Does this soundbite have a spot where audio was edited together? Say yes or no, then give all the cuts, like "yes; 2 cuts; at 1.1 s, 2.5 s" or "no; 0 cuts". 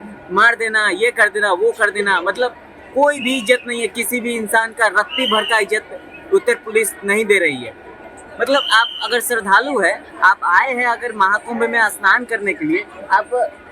no; 0 cuts